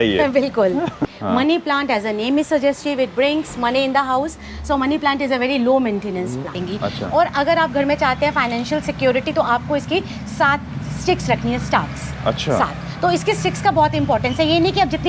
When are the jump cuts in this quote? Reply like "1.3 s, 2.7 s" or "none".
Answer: 1.0 s, 6.6 s